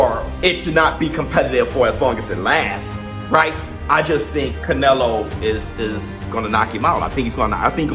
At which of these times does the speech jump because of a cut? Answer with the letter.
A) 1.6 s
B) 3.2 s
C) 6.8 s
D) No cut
D